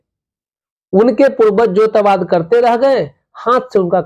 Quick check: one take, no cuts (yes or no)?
yes